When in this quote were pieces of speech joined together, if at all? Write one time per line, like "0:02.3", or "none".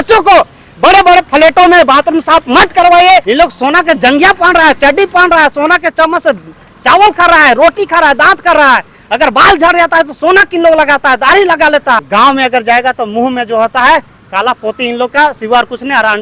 0:03.3
0:12.0